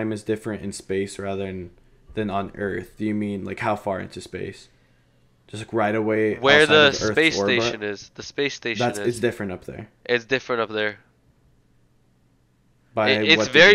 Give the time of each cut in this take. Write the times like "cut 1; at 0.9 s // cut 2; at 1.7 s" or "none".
none